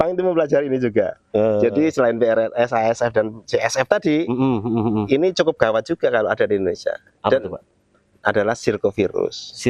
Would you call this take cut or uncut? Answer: uncut